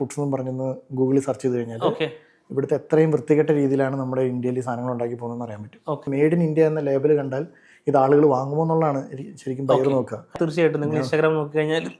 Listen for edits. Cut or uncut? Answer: cut